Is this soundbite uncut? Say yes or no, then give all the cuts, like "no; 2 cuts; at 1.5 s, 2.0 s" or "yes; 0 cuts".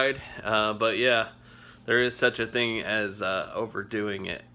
yes; 0 cuts